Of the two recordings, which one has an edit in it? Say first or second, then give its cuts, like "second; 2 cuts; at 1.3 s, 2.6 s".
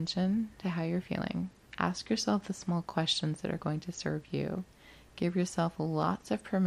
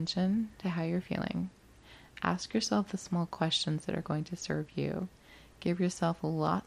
first; 1 cut; at 1.6 s